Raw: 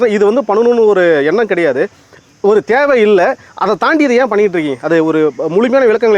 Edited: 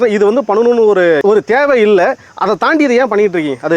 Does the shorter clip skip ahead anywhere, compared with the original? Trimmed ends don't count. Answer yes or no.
yes